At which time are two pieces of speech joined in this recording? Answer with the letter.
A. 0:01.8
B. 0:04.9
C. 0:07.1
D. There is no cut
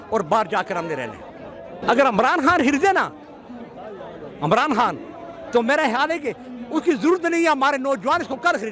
A